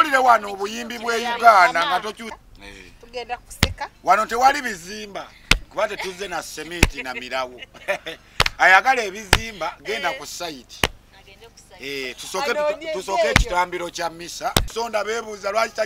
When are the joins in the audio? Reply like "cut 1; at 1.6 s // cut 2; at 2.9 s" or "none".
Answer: cut 1; at 2.3 s // cut 2; at 14.7 s